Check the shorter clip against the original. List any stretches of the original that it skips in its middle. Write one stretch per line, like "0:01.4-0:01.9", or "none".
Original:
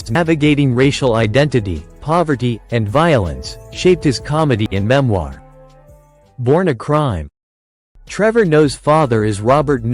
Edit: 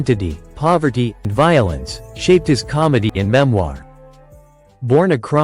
0:02.7-0:02.8

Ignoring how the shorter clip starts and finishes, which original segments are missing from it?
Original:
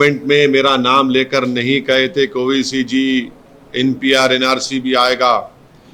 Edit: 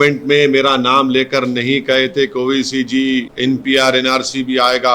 0:03.3-0:03.7

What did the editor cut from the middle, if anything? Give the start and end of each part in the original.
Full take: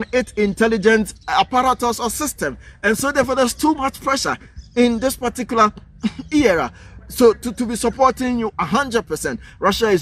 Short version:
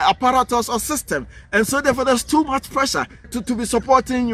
0:04.6-0:07.4

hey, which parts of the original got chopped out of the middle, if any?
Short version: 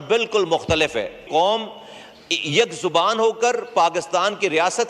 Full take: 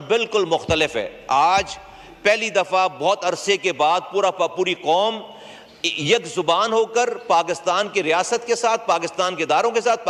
0:01.2-0:04.7

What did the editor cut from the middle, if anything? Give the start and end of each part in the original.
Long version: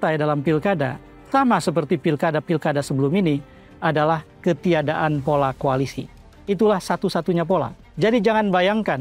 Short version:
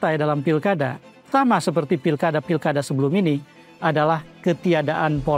none

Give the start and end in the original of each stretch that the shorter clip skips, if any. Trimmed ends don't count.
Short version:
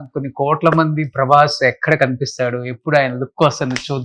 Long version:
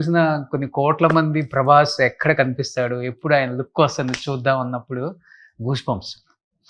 none

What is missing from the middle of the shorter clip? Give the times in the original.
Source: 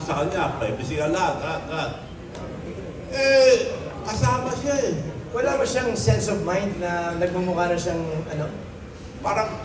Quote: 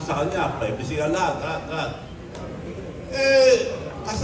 none

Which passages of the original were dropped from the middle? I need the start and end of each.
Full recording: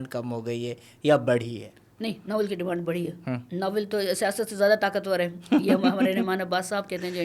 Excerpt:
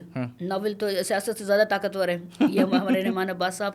none

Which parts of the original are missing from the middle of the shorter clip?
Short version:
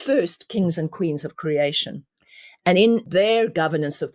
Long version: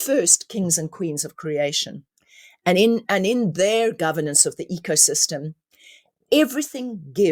0:03.1-0:03.5

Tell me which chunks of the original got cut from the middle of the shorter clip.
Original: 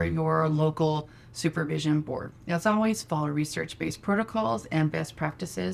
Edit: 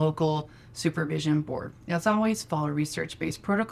none

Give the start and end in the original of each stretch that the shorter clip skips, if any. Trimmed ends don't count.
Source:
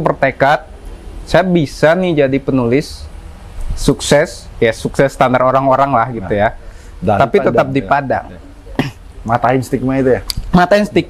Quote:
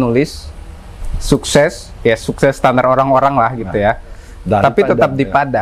none

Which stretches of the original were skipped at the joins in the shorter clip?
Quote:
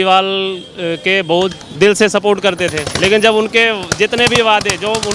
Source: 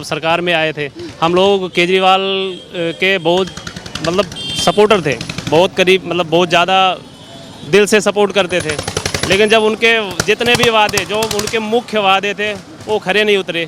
0:03.6-0:07.5
0:08.8-0:09.1

